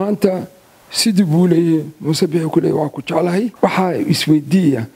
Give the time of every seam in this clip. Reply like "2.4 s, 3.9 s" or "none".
3.5 s